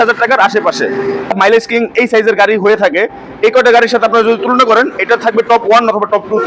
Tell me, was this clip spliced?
yes; 1 cut; at 1.4 s

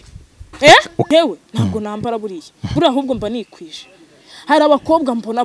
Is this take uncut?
no; 1 cut; at 1.1 s

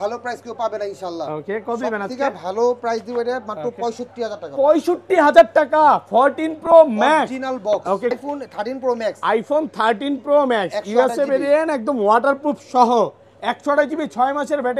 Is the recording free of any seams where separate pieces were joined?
no; 1 cut; at 8.1 s

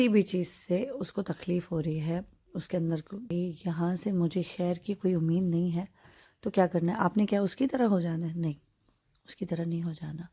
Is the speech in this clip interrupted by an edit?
yes; 1 cut; at 3.2 s

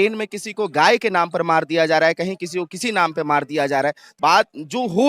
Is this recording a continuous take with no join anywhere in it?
no; 1 cut; at 4.1 s

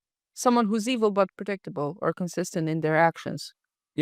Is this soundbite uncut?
yes; 0 cuts

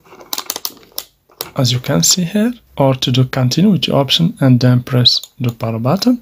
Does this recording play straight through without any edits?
no; 1 cut; at 2.6 s

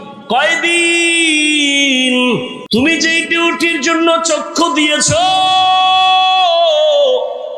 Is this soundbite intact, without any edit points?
no; 1 cut; at 2.6 s

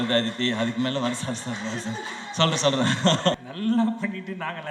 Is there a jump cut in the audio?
yes; 1 cut; at 3.4 s

